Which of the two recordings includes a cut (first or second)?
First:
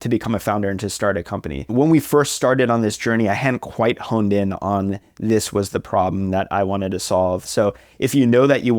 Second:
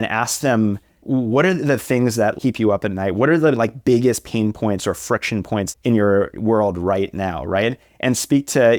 first